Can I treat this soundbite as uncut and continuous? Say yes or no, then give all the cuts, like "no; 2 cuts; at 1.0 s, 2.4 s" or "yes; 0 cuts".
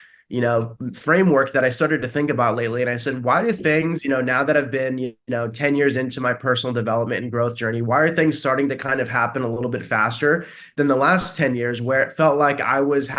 yes; 0 cuts